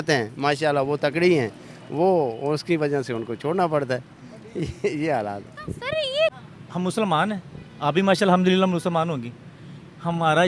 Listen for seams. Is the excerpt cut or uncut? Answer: cut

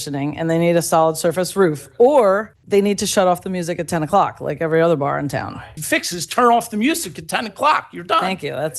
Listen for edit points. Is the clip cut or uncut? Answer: cut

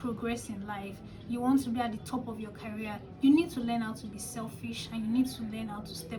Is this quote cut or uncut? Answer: uncut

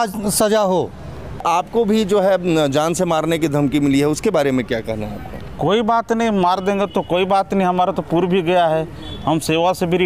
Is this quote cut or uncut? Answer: cut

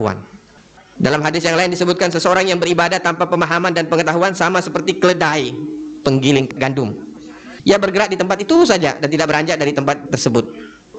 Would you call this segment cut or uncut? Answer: cut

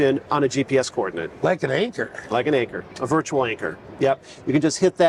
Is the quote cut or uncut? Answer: uncut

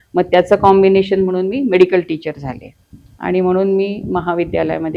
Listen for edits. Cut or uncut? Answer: uncut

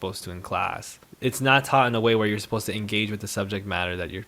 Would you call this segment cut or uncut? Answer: uncut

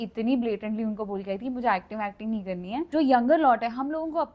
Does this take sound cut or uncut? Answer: cut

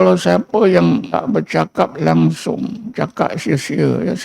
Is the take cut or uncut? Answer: cut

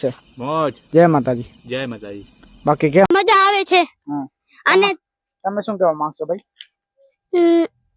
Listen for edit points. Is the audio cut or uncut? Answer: cut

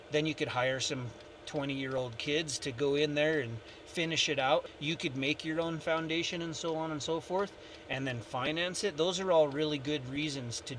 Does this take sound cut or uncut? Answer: cut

